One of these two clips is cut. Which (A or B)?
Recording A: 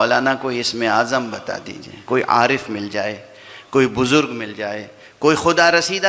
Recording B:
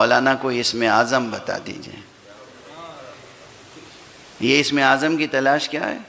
A